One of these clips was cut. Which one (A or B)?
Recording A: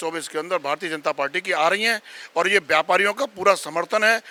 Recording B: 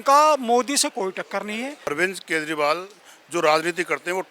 B